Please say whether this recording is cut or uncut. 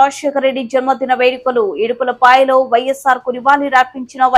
uncut